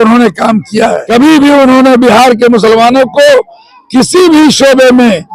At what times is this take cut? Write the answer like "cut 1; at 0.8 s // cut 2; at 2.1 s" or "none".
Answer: cut 1; at 1.0 s